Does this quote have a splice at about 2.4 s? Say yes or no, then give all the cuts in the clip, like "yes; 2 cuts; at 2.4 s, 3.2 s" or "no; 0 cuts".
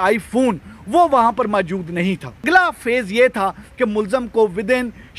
yes; 1 cut; at 2.4 s